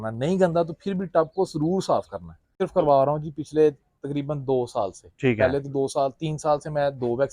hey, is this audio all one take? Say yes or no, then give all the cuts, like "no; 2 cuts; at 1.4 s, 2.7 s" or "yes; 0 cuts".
no; 1 cut; at 2.5 s